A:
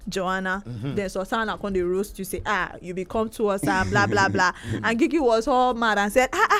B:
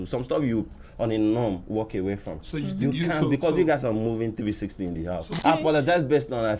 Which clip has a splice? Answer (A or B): B